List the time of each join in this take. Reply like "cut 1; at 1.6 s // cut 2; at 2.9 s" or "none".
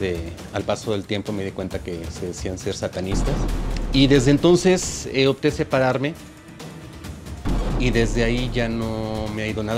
cut 1; at 3.5 s